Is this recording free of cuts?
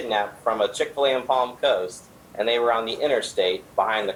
yes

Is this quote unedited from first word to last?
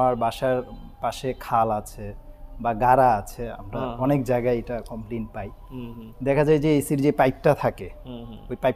yes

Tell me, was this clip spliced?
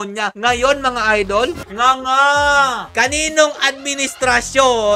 yes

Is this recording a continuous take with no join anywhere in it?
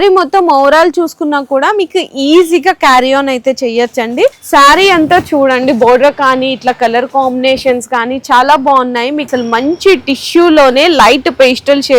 no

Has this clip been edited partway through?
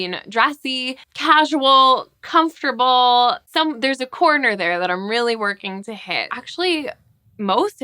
yes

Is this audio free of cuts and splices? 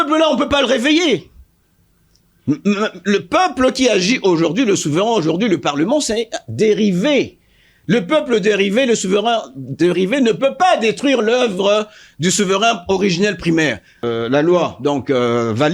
no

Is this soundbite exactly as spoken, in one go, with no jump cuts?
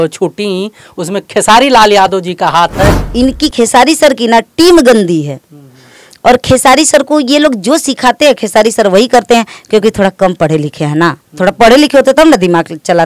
no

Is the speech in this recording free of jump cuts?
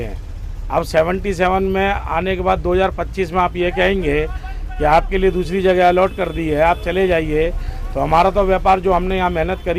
yes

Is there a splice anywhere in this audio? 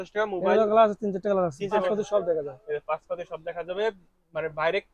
yes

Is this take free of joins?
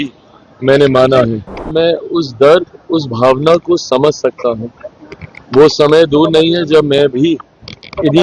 no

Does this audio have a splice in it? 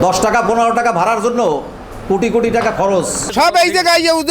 yes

